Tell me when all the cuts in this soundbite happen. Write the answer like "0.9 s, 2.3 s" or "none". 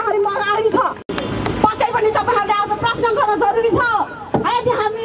none